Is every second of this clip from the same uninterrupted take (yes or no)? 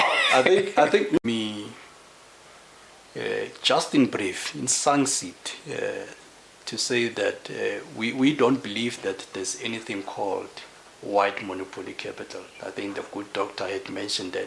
no